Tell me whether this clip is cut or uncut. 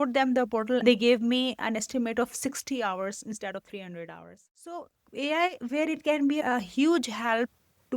cut